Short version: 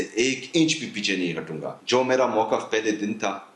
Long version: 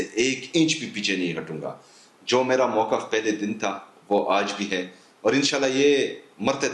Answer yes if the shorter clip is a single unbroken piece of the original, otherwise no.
no